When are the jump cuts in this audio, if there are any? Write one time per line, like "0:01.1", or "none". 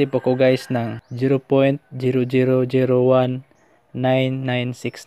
0:01.0